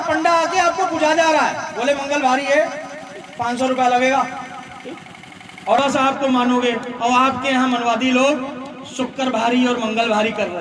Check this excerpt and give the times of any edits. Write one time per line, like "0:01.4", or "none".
0:05.8